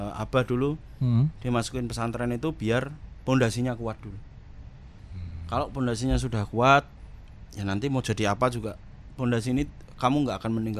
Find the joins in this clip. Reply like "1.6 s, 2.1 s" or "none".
none